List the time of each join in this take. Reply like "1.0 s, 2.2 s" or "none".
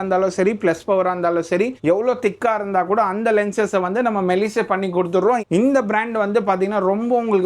none